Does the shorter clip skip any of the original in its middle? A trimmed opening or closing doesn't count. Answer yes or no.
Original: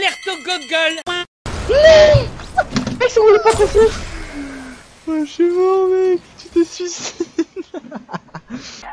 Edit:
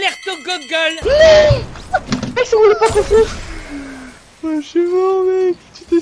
yes